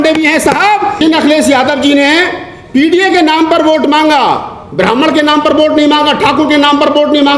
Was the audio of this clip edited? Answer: yes; 1 cut; at 1.0 s

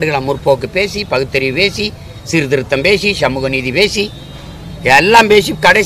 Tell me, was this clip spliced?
no; 0 cuts

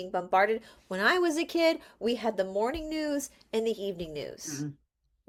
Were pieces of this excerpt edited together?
no; 0 cuts

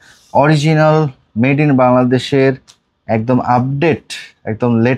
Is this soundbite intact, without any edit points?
yes; 0 cuts

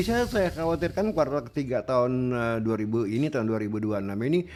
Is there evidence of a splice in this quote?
no; 0 cuts

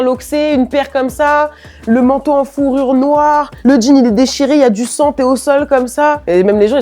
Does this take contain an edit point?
no; 0 cuts

